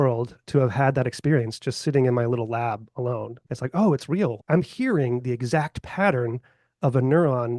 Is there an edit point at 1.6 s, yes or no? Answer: no